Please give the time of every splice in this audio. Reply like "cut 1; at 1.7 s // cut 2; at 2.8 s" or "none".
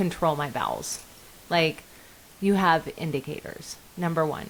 none